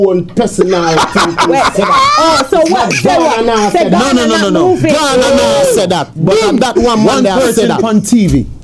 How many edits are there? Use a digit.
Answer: 0